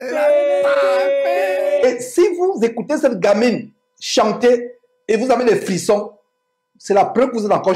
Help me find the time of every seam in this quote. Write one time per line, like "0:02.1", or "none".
0:01.8